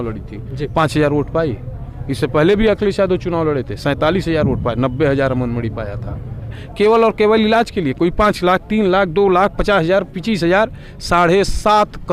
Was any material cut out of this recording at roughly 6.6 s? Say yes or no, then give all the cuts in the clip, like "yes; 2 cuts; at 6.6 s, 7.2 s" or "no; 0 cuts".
yes; 1 cut; at 6.6 s